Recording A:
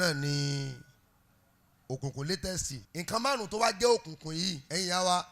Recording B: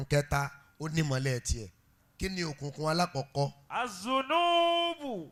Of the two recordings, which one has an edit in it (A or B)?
A